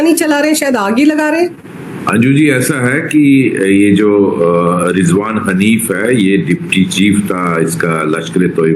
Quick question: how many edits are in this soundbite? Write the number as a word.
zero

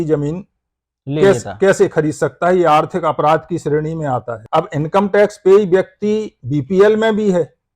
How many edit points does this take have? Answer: one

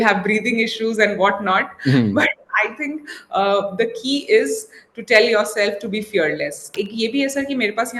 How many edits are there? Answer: one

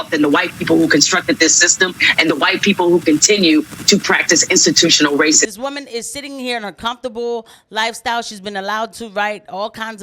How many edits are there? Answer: one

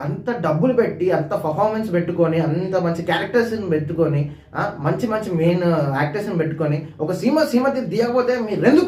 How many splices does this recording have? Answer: zero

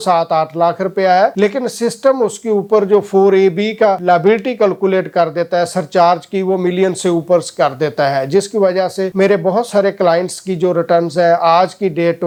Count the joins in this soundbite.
zero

